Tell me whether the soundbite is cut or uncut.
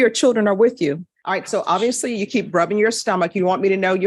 cut